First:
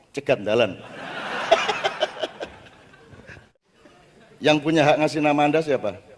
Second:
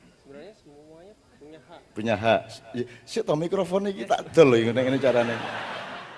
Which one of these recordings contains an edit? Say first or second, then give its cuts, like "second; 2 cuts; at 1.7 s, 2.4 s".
first; 1 cut; at 3.5 s